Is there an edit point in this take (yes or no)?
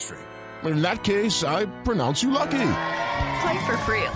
no